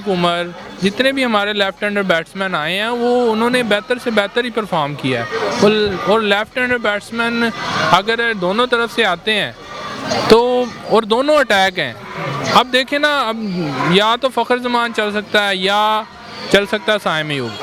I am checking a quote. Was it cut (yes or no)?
no